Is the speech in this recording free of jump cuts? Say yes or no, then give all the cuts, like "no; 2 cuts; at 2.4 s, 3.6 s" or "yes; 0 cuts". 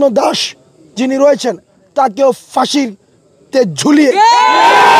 yes; 0 cuts